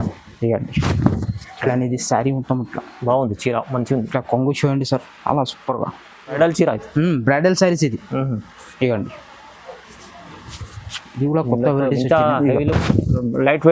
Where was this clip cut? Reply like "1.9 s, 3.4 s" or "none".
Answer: 6.4 s